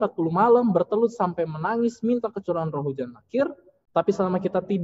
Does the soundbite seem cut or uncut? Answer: cut